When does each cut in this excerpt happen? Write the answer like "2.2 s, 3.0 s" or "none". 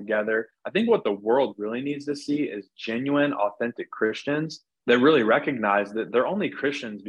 4.6 s